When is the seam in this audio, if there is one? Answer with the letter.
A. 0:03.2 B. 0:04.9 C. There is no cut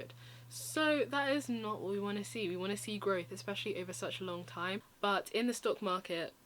B